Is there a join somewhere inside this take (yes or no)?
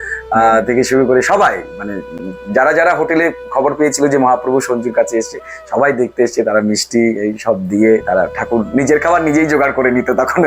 no